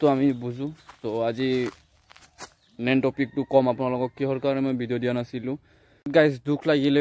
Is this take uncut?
no; 1 cut; at 6.0 s

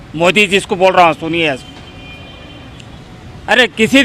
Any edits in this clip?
no; 0 cuts

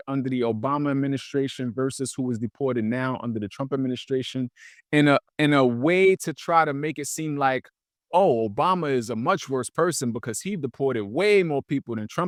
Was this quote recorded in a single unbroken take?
yes; 0 cuts

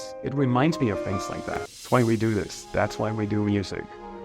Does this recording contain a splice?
yes; 1 cut; at 1.7 s

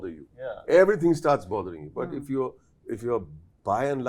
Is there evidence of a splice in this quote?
no; 0 cuts

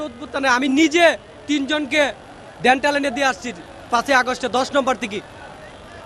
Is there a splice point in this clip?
no; 0 cuts

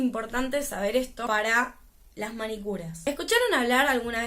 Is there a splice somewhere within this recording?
yes; 2 cuts; at 1.2 s, 2.9 s

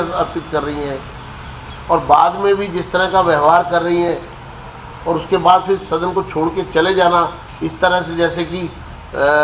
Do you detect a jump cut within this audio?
no; 0 cuts

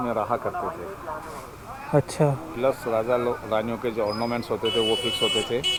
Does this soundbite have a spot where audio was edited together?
no; 0 cuts

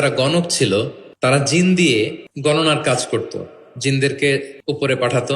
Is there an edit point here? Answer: yes; 3 cuts; at 1.0 s, 2.2 s, 4.5 s

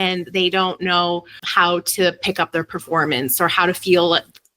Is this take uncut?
no; 1 cut; at 1.4 s

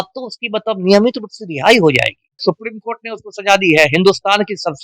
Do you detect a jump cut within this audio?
yes; 1 cut; at 2.4 s

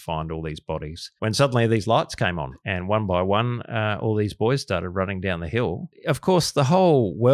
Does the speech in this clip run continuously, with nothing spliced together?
no; 3 cuts; at 1.0 s, 2.5 s, 5.9 s

